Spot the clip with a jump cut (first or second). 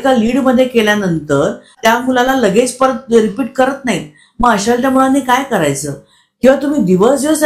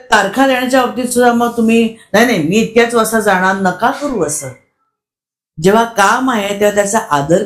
first